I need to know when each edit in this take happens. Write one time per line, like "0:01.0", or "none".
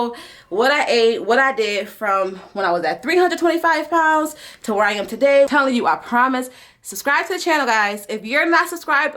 0:05.5